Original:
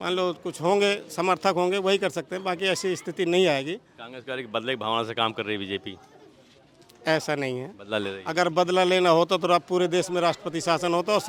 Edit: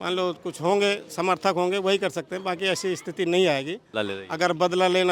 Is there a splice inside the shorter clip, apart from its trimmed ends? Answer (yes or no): yes